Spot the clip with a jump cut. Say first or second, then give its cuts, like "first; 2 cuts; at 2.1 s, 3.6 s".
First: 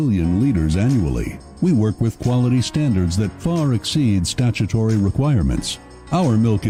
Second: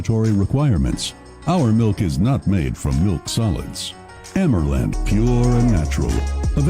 second; 1 cut; at 5.0 s